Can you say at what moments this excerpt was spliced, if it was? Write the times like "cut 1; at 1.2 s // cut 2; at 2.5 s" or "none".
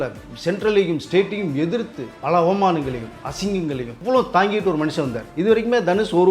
cut 1; at 2.1 s // cut 2; at 3.9 s // cut 3; at 5.3 s